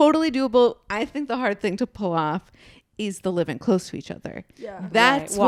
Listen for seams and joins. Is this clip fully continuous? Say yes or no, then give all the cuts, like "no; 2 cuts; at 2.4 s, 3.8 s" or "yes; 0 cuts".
yes; 0 cuts